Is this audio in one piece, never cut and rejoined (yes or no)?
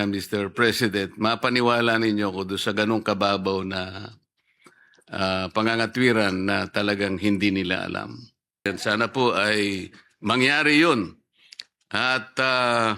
no